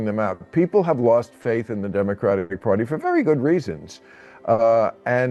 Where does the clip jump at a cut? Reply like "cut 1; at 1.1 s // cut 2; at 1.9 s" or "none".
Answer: none